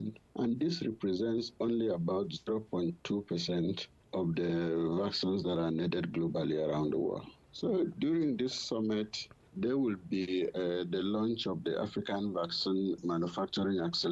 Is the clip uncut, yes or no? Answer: no